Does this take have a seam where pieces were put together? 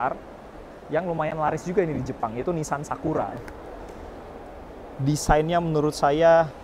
yes; 1 cut; at 3.5 s

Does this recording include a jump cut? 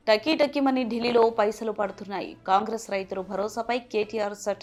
no; 0 cuts

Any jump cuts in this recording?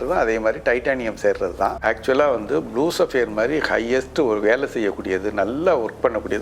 yes; 1 cut; at 1.8 s

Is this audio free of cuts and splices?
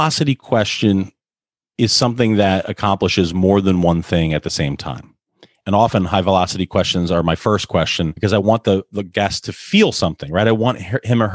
no; 1 cut; at 5.5 s

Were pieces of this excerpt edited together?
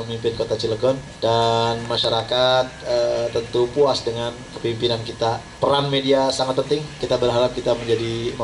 yes; 3 cuts; at 1.1 s, 5.5 s, 7.0 s

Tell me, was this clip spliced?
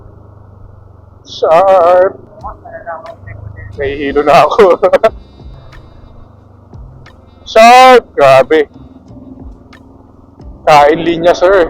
yes; 2 cuts; at 2.3 s, 5.5 s

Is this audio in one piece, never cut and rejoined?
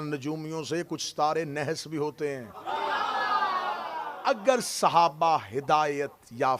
no; 1 cut; at 4.1 s

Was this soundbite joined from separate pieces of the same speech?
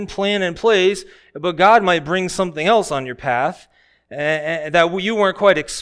no; 0 cuts

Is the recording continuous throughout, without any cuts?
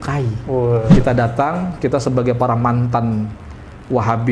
no; 1 cut; at 0.9 s

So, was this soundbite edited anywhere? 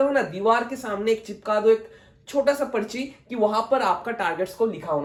no; 0 cuts

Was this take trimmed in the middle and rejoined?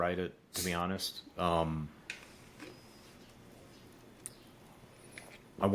no; 0 cuts

